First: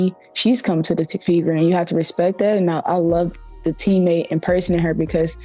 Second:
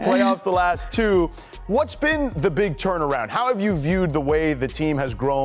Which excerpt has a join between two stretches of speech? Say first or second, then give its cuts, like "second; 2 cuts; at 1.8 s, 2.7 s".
first; 1 cut; at 2.7 s